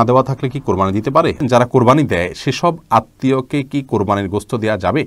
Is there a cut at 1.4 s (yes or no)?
yes